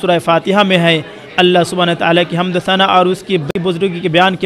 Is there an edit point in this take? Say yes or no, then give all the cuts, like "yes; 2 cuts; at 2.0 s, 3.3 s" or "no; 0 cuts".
yes; 1 cut; at 3.5 s